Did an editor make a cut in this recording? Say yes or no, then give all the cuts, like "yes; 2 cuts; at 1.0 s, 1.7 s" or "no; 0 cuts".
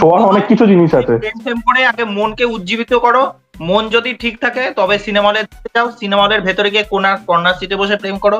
no; 0 cuts